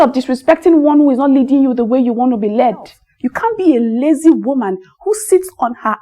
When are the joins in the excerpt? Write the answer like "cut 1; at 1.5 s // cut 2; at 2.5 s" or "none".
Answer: cut 1; at 3.0 s